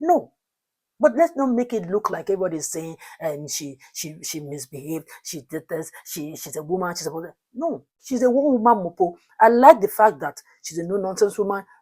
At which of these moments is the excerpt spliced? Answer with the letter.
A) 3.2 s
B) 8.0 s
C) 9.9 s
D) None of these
B